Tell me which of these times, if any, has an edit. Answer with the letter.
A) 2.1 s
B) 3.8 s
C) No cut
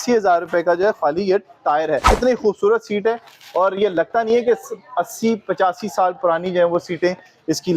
A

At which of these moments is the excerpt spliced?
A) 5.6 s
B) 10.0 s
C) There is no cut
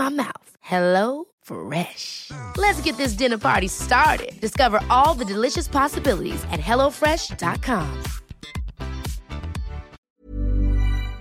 B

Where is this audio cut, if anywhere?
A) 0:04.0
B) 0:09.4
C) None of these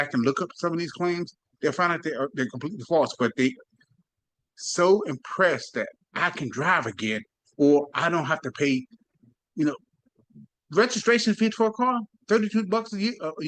C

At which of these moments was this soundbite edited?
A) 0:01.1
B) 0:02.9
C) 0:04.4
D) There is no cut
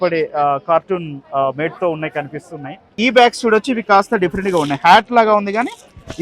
B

